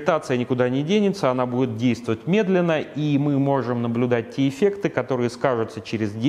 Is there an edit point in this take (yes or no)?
no